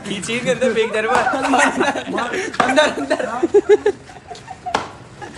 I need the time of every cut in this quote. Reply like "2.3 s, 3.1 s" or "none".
none